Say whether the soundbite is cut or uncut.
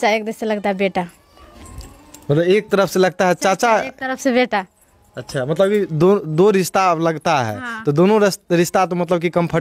uncut